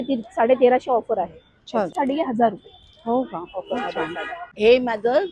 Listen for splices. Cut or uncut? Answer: cut